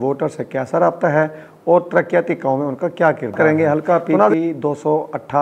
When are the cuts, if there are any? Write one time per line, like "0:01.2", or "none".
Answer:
0:03.3